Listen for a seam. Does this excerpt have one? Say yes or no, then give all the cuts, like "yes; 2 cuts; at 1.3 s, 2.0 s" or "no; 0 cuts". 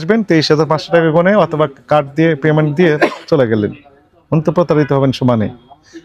no; 0 cuts